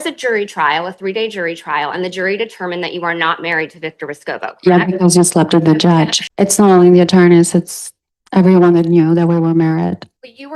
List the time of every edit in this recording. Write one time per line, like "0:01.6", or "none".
0:06.2